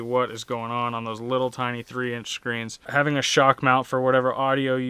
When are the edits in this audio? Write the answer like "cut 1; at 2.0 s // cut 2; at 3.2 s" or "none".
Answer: cut 1; at 2.8 s